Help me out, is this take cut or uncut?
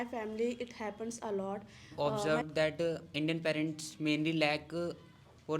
cut